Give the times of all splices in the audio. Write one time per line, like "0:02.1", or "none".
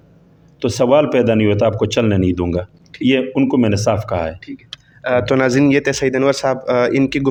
none